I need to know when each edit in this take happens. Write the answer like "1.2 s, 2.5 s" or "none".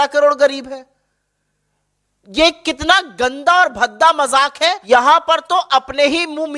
4.8 s